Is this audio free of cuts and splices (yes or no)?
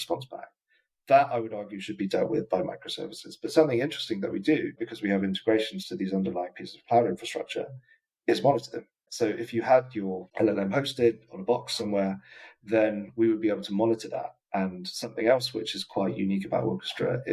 yes